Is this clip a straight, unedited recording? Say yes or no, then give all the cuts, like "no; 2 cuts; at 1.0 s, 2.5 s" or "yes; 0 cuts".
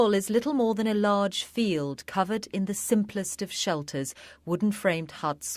yes; 0 cuts